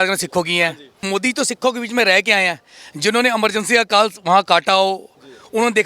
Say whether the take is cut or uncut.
cut